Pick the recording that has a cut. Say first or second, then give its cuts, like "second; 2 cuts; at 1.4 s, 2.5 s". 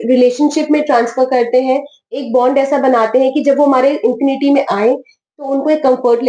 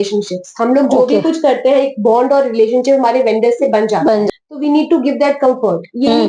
second; 1 cut; at 4.3 s